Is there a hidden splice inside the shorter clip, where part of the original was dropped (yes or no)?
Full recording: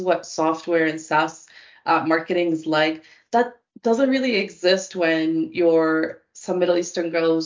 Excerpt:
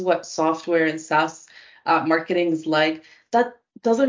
no